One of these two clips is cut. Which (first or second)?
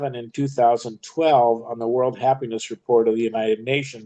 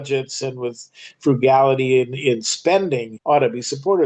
second